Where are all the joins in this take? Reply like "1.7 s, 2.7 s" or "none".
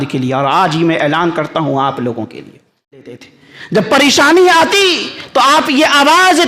3.0 s